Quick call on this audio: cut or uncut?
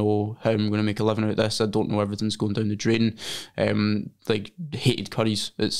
uncut